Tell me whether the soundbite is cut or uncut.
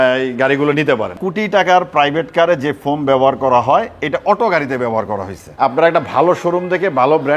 cut